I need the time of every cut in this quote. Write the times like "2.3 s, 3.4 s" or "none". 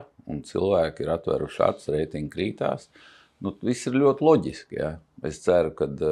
none